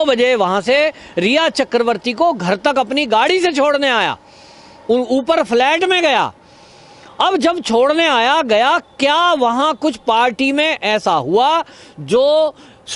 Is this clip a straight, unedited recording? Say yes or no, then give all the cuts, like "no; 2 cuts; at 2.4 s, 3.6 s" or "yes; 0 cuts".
yes; 0 cuts